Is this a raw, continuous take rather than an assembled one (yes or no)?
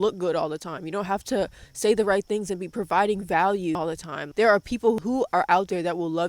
no